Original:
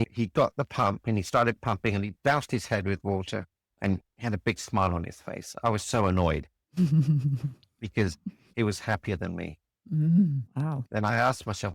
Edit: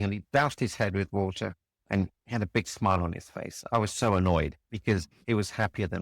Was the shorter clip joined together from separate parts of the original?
yes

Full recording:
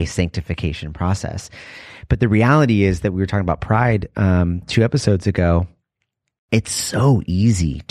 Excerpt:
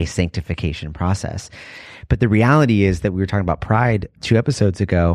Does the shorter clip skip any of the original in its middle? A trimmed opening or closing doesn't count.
yes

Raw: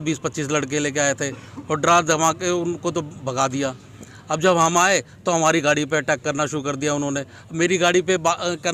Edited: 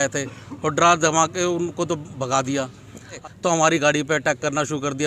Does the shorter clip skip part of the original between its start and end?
yes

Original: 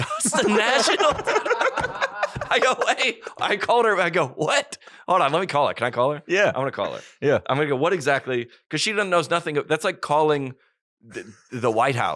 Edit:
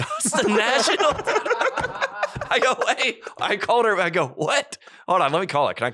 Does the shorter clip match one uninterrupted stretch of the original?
yes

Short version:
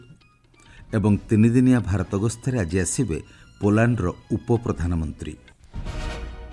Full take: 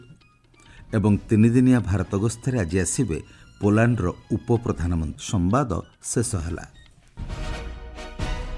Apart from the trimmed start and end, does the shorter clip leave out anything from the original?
yes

